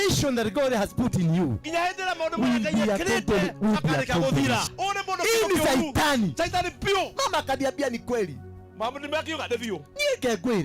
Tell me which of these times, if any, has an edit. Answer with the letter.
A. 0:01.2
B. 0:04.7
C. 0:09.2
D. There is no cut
B